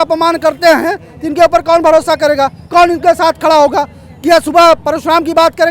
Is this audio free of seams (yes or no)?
yes